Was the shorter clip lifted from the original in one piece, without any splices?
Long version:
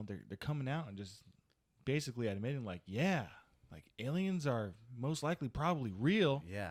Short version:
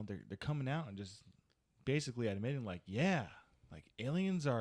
yes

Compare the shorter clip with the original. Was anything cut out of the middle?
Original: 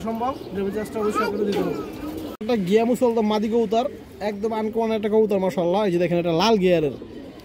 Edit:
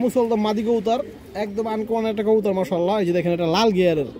no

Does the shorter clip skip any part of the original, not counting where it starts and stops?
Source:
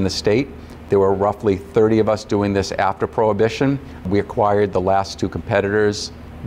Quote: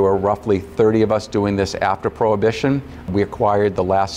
no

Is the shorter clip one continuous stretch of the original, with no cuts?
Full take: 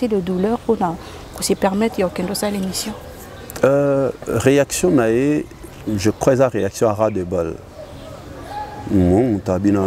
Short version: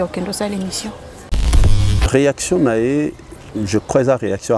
no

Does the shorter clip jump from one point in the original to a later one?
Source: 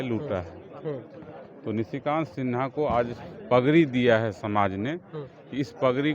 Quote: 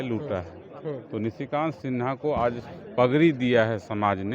yes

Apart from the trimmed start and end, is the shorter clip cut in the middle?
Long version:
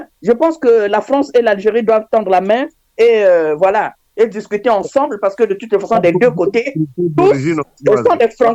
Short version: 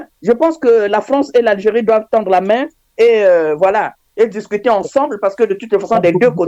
no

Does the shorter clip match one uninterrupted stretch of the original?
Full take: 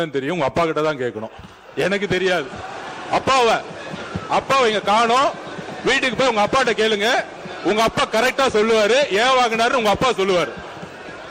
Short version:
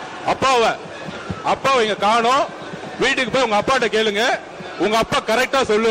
yes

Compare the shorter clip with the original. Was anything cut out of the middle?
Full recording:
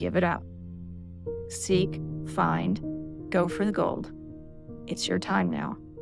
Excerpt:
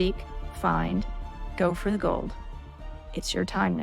no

